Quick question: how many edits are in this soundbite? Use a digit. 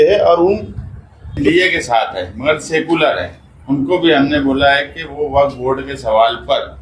1